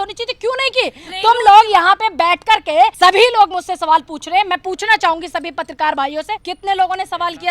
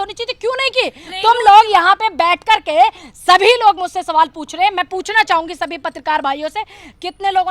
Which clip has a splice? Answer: first; 2 cuts; at 2.9 s, 6.5 s

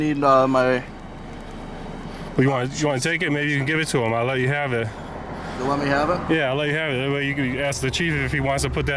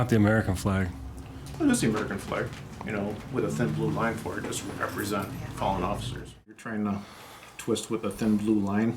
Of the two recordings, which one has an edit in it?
second; 1 cut; at 6.6 s

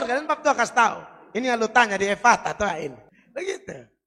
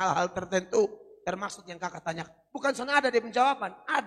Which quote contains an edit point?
first; 1 cut; at 3.1 s

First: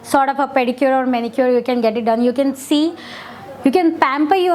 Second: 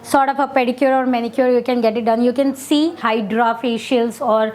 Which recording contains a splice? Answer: second; 1 cut; at 3.0 s

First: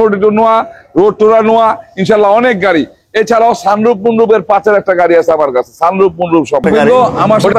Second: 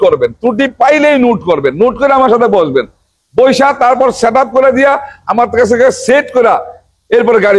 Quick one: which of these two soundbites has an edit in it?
first; 1 cut; at 6.6 s

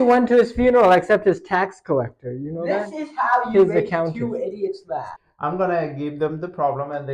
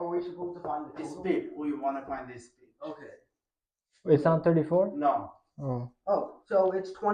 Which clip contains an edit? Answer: first; 1 cut; at 5.2 s

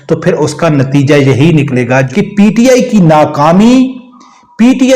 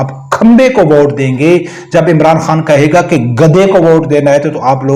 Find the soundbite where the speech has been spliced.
first; 1 cut; at 2.1 s

